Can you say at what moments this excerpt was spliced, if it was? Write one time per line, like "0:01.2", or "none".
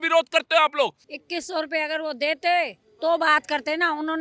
0:01.0